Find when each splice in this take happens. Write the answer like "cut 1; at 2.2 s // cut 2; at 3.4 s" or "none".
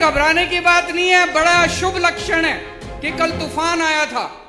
none